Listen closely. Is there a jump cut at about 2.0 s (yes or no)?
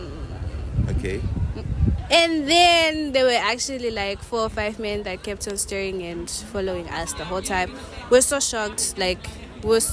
yes